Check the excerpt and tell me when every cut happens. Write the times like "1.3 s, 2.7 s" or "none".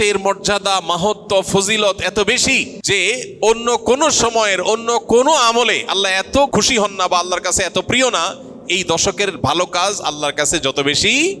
2.7 s, 6.5 s